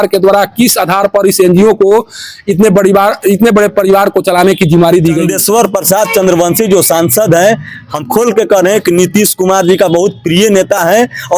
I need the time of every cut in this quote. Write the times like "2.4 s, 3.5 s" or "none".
5.2 s